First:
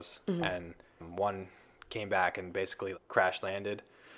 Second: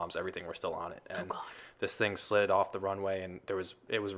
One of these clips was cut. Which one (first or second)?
first